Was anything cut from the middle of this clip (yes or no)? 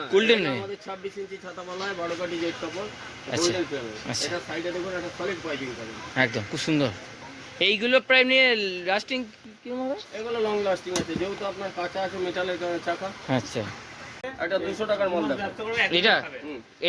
yes